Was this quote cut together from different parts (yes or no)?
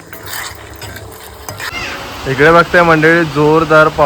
yes